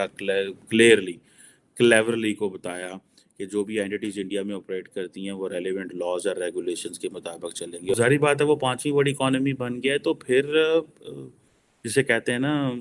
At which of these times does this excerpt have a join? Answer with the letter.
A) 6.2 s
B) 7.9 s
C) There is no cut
B